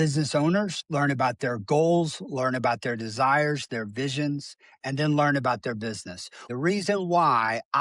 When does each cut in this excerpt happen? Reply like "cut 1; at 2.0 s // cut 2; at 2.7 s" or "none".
cut 1; at 6.4 s

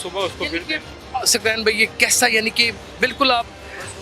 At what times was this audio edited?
none

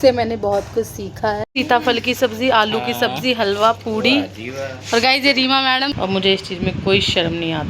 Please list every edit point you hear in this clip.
cut 1; at 1.5 s // cut 2; at 6.0 s

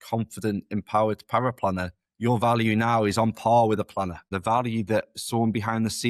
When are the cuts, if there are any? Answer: cut 1; at 4.3 s

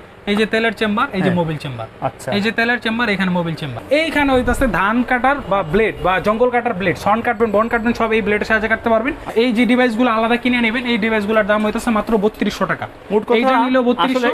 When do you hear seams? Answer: cut 1; at 3.7 s // cut 2; at 9.3 s

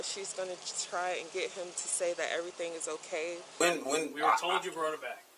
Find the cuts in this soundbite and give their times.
cut 1; at 3.6 s

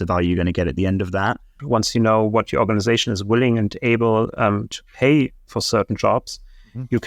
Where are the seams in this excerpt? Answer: cut 1; at 1.6 s

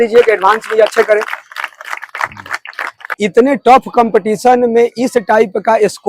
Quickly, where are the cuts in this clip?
cut 1; at 3.1 s

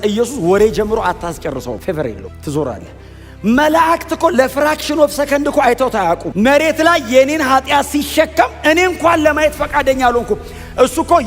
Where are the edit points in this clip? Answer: cut 1; at 1.9 s // cut 2; at 6.3 s

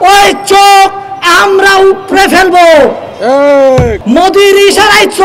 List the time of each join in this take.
cut 1; at 4.0 s

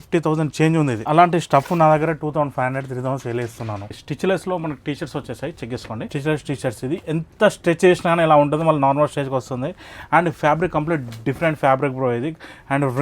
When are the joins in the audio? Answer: cut 1; at 1.0 s // cut 2; at 4.0 s // cut 3; at 6.1 s

